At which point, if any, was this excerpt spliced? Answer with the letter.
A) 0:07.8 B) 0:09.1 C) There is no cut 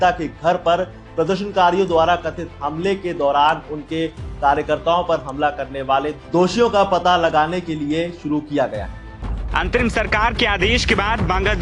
B